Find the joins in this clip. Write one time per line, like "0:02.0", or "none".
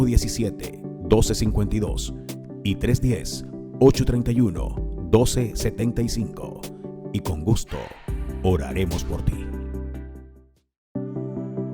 0:10.8